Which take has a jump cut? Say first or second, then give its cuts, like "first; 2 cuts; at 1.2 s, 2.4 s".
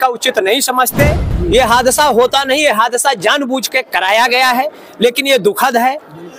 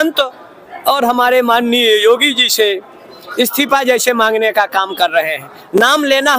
first; 1 cut; at 1.3 s